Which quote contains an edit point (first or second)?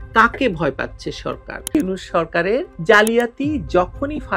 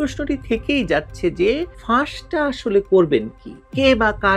first